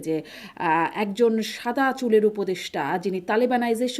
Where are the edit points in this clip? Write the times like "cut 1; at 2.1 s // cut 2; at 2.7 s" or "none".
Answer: none